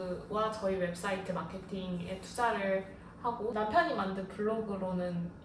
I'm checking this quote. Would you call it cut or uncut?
cut